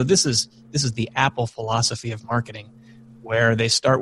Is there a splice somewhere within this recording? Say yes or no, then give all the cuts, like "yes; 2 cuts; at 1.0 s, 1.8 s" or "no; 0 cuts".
no; 0 cuts